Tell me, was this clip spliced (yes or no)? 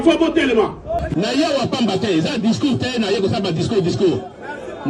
yes